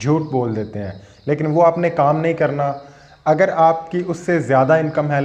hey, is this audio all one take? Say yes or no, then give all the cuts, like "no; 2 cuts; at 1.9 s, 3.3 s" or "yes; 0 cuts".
yes; 0 cuts